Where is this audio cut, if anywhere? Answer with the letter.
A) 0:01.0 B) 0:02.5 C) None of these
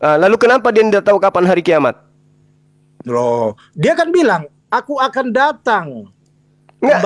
C